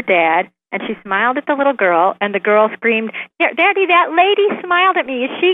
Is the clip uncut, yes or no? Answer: yes